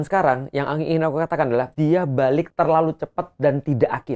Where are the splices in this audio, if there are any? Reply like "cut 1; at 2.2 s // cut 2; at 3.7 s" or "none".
cut 1; at 1.7 s // cut 2; at 2.5 s